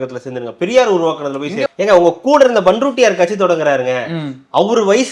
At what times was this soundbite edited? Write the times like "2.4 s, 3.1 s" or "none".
1.6 s